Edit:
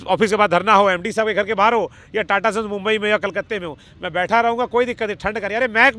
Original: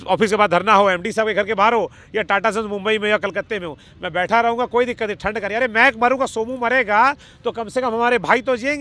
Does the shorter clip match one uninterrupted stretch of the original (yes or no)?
yes